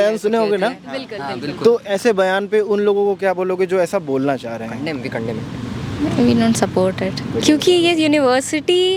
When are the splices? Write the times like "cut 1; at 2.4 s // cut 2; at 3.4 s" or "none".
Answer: none